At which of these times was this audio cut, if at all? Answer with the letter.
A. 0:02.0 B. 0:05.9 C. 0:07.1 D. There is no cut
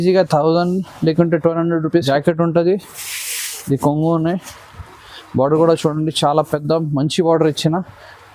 A